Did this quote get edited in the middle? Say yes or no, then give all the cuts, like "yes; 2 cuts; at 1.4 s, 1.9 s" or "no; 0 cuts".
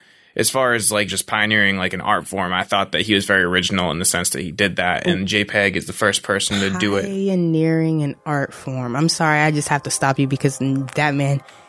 yes; 1 cut; at 1.1 s